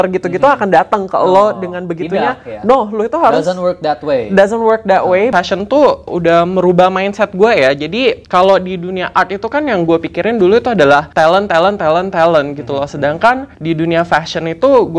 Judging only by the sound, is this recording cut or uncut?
cut